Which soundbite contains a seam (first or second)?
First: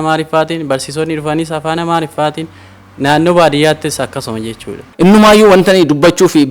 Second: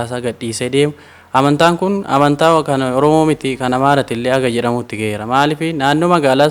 first